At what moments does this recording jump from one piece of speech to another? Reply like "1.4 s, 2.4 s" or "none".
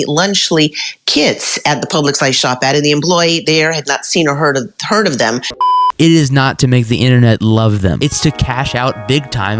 5.7 s